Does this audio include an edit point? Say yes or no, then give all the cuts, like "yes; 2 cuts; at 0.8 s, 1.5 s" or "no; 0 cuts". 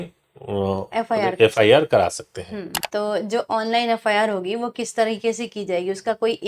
yes; 1 cut; at 2.8 s